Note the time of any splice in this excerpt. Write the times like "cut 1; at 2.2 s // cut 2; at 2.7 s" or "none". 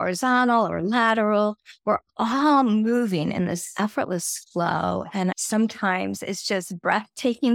cut 1; at 5.3 s